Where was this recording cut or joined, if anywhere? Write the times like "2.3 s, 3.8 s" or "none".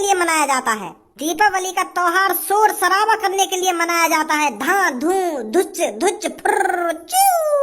1.2 s